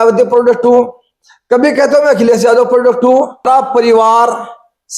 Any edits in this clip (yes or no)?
yes